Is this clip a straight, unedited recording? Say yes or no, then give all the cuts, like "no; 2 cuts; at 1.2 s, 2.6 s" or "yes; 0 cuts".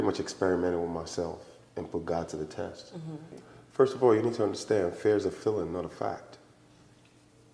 no; 1 cut; at 3.4 s